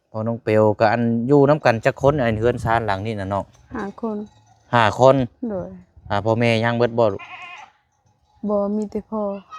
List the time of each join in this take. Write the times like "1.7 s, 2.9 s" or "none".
none